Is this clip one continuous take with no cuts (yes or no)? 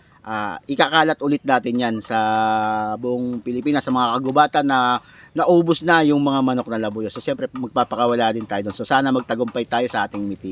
yes